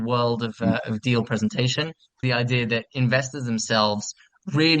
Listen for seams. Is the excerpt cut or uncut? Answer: cut